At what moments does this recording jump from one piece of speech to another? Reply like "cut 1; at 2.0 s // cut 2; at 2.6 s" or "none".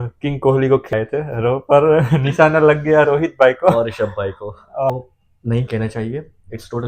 cut 1; at 0.9 s // cut 2; at 4.9 s